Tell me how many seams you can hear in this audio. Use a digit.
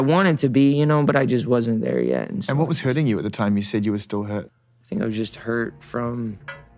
0